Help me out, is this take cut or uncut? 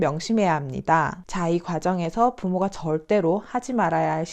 cut